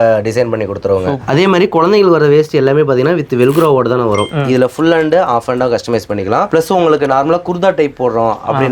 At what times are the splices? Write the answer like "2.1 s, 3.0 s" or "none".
1.2 s, 4.3 s, 6.5 s